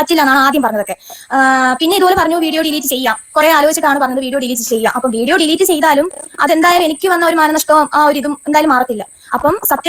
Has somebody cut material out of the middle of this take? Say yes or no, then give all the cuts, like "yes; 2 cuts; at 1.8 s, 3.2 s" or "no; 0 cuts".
no; 0 cuts